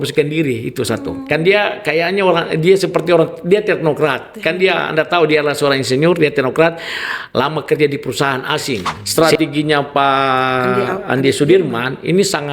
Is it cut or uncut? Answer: cut